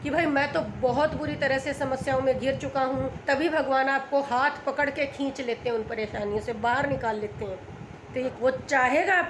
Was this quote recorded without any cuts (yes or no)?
no